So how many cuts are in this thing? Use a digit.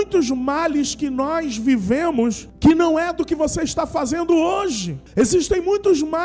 2